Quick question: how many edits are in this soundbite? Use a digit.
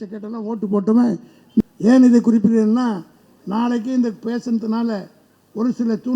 1